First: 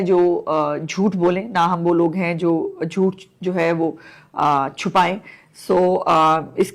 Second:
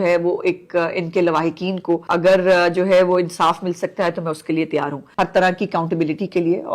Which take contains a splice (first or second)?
second